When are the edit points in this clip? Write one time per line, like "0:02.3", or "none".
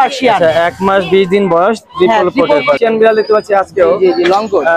0:02.8